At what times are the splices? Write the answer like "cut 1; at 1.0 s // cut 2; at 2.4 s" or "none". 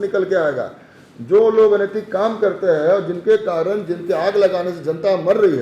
none

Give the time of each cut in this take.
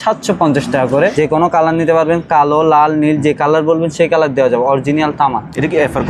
cut 1; at 1.1 s

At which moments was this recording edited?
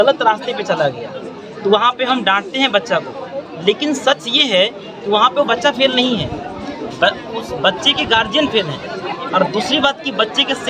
none

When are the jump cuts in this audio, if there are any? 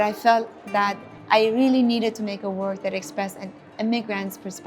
cut 1; at 1.1 s

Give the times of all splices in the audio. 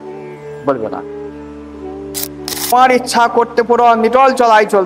cut 1; at 2.7 s

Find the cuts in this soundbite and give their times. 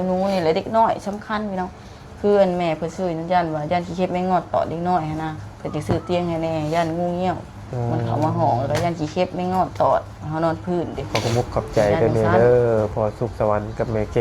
cut 1; at 11.0 s

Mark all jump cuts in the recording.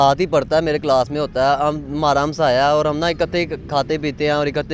none

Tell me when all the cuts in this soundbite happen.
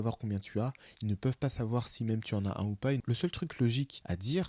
cut 1; at 3.0 s

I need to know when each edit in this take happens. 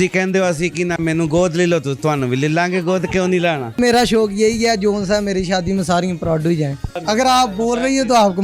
cut 1; at 3.8 s // cut 2; at 6.9 s

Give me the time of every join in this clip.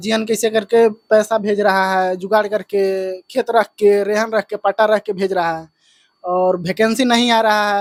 none

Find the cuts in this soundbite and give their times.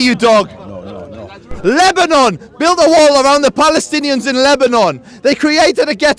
cut 1; at 1.5 s

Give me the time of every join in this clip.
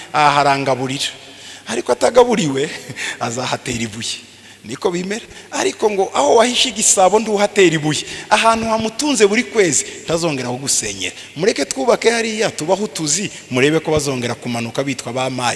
none

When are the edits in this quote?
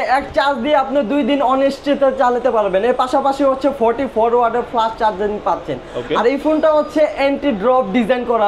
none

